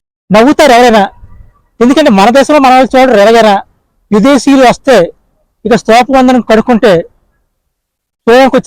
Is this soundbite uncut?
yes; 0 cuts

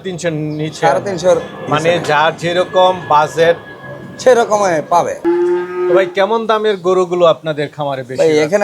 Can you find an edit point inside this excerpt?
yes; 1 cut; at 5.2 s

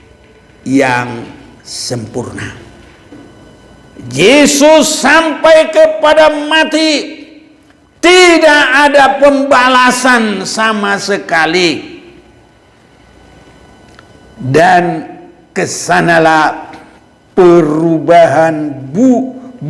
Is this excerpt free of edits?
no; 1 cut; at 3.5 s

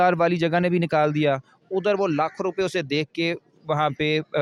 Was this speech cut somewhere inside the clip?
no; 0 cuts

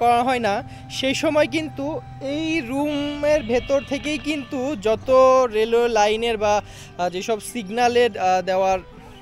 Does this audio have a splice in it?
no; 0 cuts

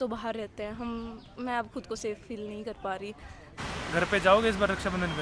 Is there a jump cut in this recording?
yes; 1 cut; at 3.5 s

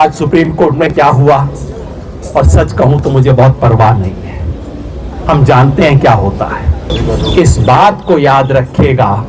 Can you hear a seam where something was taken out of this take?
yes; 1 cut; at 6.9 s

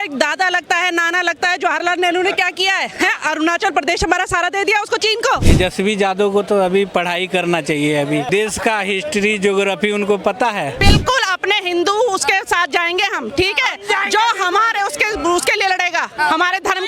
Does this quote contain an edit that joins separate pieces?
yes; 3 cuts; at 5.4 s, 8.3 s, 10.8 s

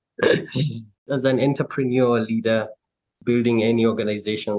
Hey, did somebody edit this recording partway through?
no; 0 cuts

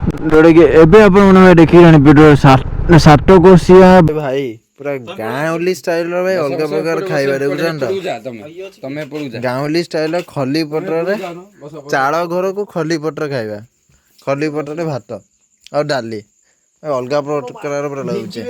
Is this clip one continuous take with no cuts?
no; 1 cut; at 4.1 s

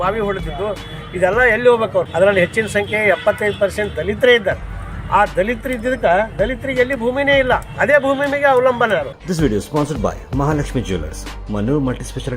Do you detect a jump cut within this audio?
yes; 2 cuts; at 2.1 s, 9.2 s

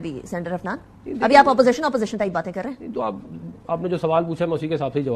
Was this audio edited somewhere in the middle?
no; 0 cuts

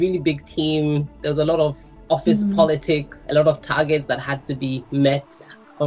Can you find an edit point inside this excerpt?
yes; 1 cut; at 3.1 s

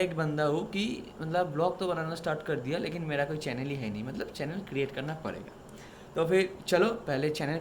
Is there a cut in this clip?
no; 0 cuts

